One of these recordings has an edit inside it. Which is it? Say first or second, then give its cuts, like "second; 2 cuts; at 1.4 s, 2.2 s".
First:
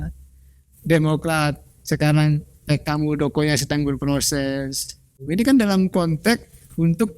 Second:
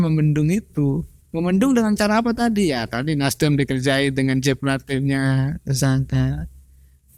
first; 1 cut; at 5.2 s